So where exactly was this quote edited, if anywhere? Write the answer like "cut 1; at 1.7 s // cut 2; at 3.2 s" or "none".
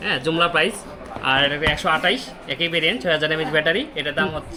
none